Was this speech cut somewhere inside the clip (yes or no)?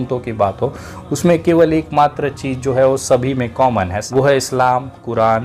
yes